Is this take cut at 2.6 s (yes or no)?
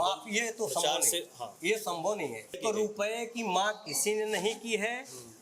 yes